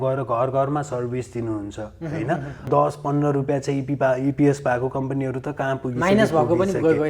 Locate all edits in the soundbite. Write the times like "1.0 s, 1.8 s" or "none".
2.7 s

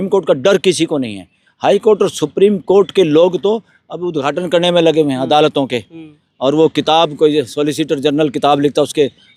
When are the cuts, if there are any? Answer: none

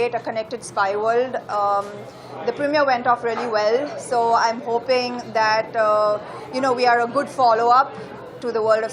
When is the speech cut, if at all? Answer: none

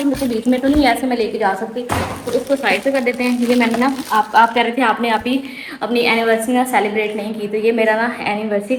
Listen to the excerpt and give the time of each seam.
none

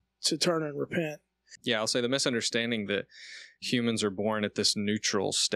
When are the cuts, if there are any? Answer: 1.6 s

